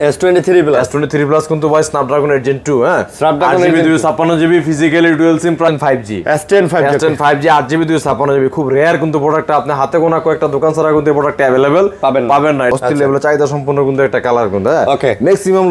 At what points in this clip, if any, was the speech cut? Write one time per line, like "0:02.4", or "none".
0:05.7
0:12.7